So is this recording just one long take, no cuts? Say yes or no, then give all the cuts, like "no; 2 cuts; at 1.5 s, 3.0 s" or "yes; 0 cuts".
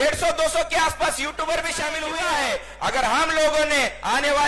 no; 1 cut; at 2.0 s